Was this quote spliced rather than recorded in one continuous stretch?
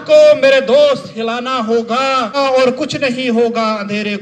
yes; 1 cut; at 2.4 s

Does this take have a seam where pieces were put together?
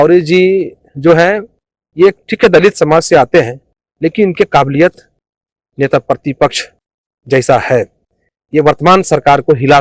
no; 0 cuts

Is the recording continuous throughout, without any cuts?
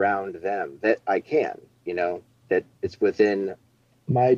no; 1 cut; at 2.4 s

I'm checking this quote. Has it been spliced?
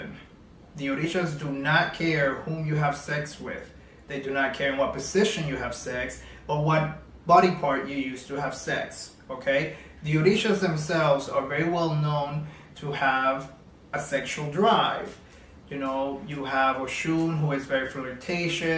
no; 0 cuts

